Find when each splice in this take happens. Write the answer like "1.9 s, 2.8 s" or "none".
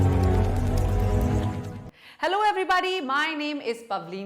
1.6 s